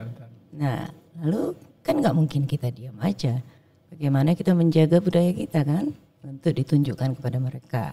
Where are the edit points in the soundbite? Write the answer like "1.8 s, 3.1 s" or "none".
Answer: 1.7 s

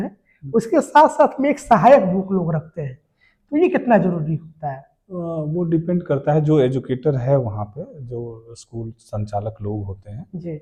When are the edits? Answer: none

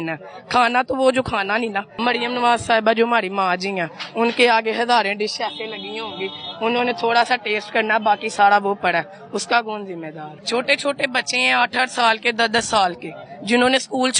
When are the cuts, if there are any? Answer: 1.9 s, 10.3 s

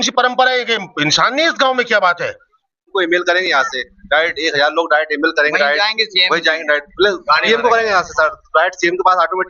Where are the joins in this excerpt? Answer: 2.9 s

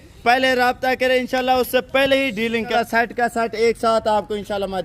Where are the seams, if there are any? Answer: 2.8 s

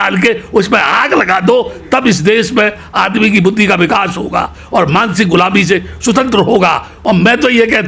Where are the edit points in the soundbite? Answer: 6.9 s

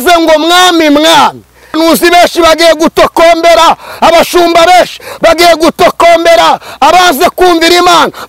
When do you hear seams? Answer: 1.8 s

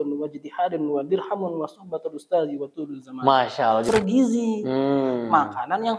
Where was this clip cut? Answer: 3.8 s

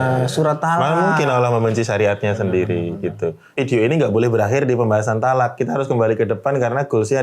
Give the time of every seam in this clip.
3.4 s

